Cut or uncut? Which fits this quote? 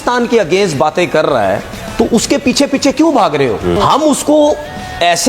cut